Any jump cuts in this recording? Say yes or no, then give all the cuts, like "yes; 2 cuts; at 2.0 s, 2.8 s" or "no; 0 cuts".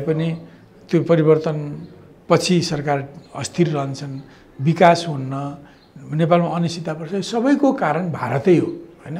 no; 0 cuts